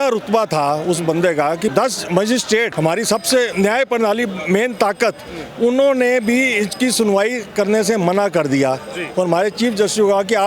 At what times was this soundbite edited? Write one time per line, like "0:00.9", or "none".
0:01.7
0:02.7
0:03.5